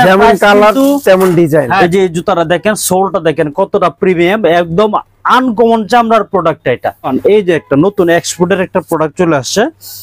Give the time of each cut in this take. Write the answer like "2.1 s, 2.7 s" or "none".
1.8 s, 7.1 s